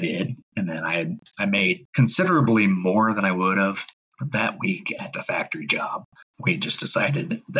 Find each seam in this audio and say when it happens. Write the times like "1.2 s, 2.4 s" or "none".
6.3 s